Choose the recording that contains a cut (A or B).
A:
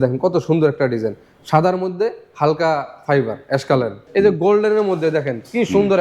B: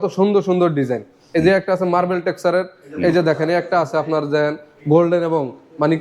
A